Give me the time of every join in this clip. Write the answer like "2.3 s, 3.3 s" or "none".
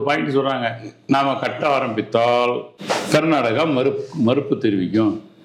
2.7 s